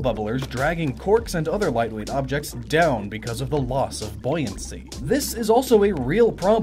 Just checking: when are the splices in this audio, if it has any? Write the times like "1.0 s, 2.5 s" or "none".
none